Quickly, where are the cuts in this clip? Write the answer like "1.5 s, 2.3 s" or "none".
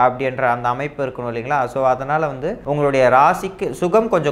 2.5 s